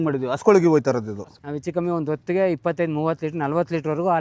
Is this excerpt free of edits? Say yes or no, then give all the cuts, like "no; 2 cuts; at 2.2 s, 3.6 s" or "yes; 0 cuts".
no; 1 cut; at 1.3 s